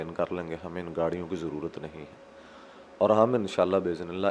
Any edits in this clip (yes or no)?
no